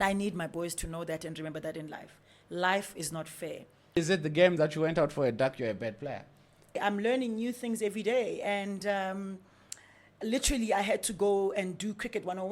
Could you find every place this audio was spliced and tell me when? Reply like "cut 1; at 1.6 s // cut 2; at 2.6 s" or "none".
cut 1; at 4.0 s // cut 2; at 6.8 s